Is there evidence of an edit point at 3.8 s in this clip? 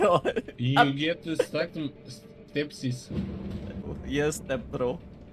yes; 1 cut; at 3.8 s

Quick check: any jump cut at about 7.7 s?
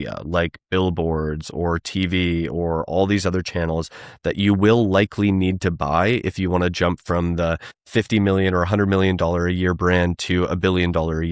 yes; 1 cut; at 7.7 s

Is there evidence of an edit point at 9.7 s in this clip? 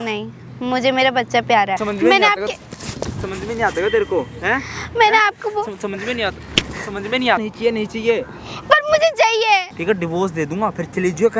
yes; 3 cuts; at 1.8 s, 7.4 s, 9.7 s

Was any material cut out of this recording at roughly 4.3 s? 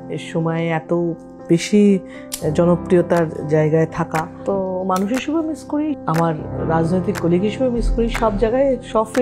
yes; 2 cuts; at 4.3 s, 6.0 s

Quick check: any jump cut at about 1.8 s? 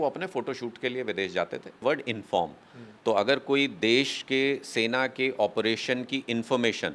yes; 1 cut; at 1.8 s

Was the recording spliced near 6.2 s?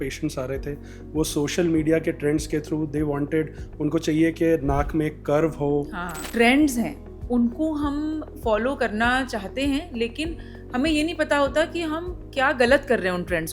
yes; 1 cut; at 6.2 s

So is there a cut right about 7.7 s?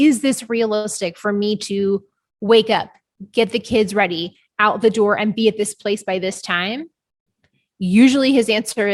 no; 0 cuts

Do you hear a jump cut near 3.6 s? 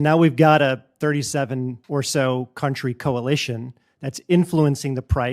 no; 1 cut; at 1.8 s

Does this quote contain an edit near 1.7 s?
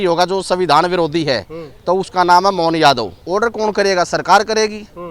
no; 1 cut; at 3.2 s

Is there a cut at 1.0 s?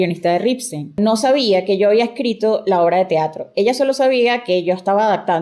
yes; 1 cut; at 1.0 s

